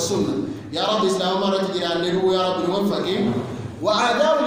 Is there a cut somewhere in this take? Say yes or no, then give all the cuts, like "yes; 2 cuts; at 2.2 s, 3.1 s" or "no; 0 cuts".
no; 0 cuts